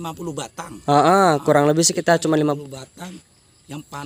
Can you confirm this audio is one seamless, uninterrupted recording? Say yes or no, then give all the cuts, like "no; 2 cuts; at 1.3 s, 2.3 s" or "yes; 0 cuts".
yes; 0 cuts